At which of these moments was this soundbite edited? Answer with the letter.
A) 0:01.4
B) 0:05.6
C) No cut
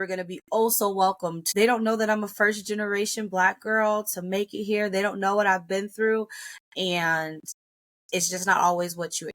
A